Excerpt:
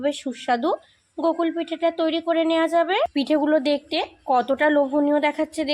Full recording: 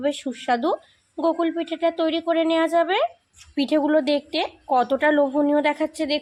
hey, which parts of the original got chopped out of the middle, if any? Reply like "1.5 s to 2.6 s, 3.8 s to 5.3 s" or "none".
3.1 s to 3.5 s